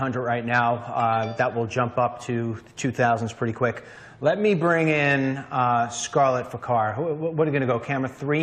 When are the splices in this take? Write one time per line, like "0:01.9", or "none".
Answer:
0:05.0